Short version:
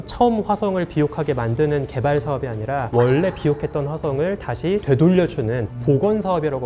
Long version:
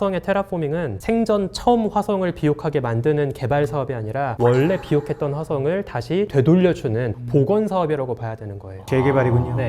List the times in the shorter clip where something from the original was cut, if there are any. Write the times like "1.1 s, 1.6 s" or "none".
none